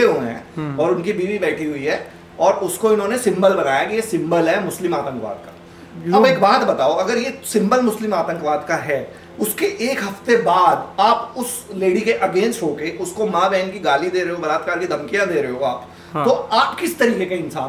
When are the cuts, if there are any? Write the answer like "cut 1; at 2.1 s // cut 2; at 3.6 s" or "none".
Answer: none